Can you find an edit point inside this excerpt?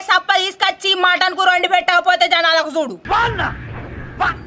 no; 0 cuts

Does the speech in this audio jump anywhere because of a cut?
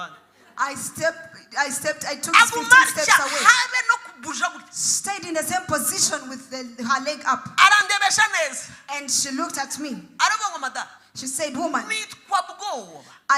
no; 0 cuts

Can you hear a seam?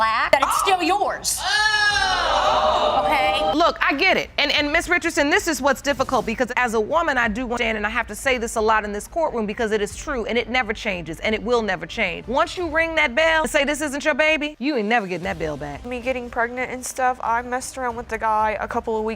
yes; 2 cuts; at 3.5 s, 15.9 s

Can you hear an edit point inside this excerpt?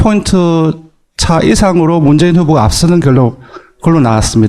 yes; 1 cut; at 1.6 s

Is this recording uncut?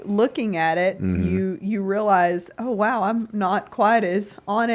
yes; 0 cuts

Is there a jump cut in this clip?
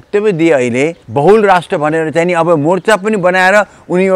yes; 1 cut; at 1.0 s

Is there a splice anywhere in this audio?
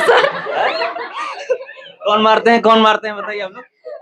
no; 0 cuts

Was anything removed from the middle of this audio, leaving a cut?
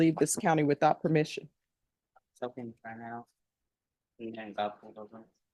no; 0 cuts

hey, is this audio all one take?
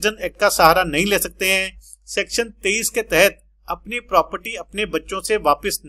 yes; 0 cuts

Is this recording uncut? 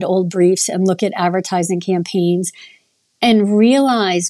yes; 0 cuts

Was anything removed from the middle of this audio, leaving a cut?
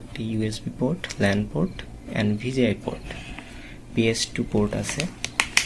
no; 0 cuts

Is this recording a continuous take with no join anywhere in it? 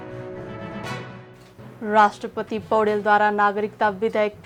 yes; 0 cuts

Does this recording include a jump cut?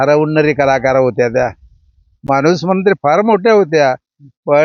no; 0 cuts

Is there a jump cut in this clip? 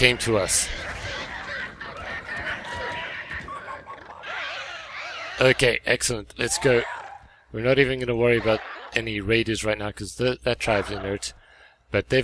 no; 0 cuts

